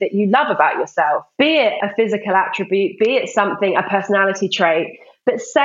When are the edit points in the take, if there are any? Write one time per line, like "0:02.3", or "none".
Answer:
0:01.8